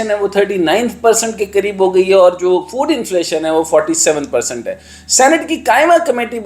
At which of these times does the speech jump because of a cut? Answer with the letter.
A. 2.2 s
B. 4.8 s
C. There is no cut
C